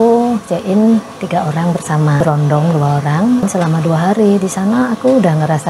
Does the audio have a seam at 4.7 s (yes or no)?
no